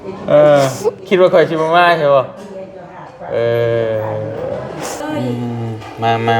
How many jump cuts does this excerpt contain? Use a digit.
1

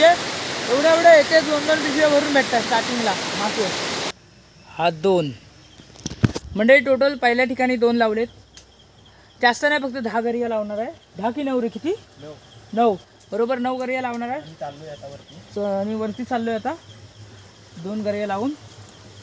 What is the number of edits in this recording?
1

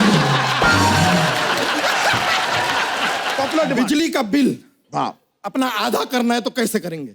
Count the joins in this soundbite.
1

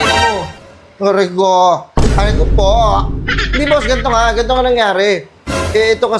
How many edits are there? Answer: 0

